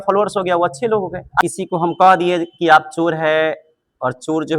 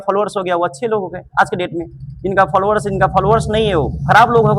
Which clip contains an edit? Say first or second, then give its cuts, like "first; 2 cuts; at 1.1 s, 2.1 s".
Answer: first; 1 cut; at 1.4 s